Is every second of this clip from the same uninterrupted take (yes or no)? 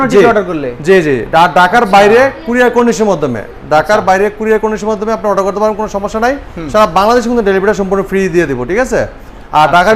yes